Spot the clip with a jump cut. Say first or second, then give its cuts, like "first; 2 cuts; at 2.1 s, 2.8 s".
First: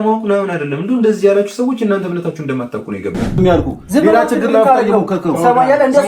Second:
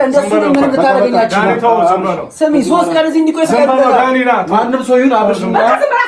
first; 1 cut; at 3.2 s